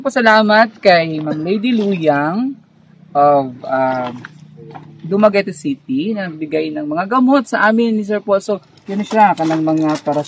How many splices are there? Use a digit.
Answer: 1